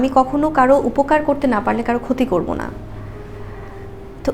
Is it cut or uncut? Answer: uncut